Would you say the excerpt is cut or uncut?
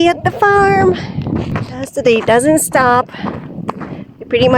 cut